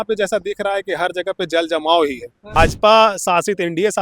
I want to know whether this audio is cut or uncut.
cut